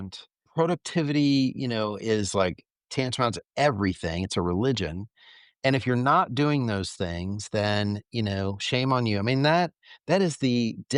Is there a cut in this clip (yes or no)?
no